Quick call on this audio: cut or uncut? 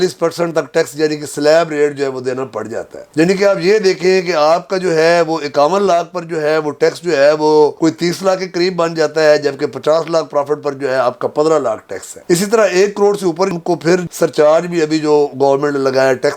uncut